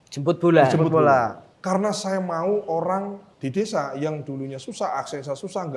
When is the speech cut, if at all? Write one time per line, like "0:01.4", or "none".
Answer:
0:01.5
0:03.2